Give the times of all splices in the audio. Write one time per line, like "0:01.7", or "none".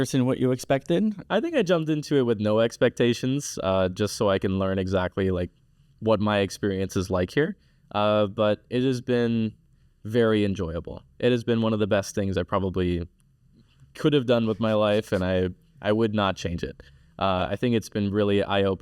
0:01.2